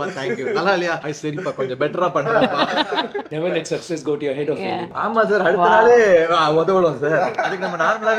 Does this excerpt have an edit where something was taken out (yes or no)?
yes